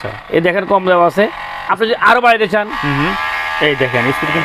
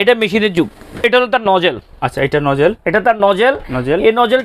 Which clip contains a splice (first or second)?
second